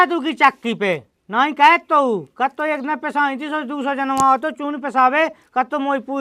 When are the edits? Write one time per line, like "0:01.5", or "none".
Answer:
none